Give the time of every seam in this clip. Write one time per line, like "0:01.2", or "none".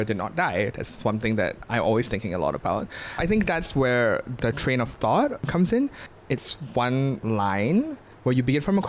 0:03.2
0:04.4
0:06.1
0:07.2